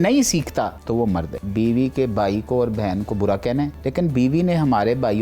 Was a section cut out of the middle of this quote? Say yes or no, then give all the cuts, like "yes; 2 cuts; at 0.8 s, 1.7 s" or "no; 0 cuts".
yes; 2 cuts; at 1.3 s, 3.8 s